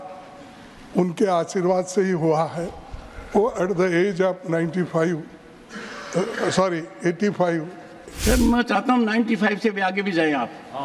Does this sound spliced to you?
yes; 1 cut; at 8.0 s

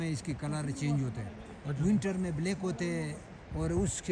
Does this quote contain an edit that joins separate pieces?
no; 0 cuts

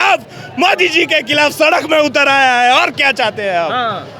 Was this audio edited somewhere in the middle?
no; 0 cuts

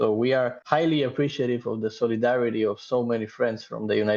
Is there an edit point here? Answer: no; 0 cuts

